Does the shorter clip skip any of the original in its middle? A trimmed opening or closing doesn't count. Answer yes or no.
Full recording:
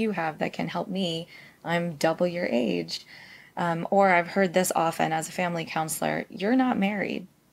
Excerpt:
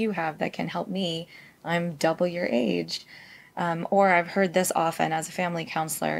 no